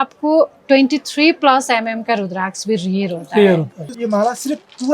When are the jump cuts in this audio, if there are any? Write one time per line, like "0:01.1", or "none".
0:03.9